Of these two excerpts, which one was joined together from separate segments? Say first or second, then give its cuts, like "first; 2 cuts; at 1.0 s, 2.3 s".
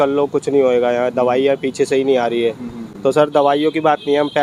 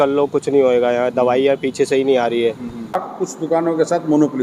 second; 1 cut; at 3.0 s